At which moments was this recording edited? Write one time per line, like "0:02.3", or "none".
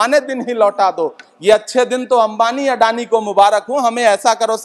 none